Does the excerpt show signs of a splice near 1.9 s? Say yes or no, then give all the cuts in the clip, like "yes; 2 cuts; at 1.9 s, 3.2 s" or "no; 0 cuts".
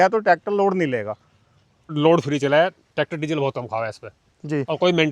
yes; 1 cut; at 1.9 s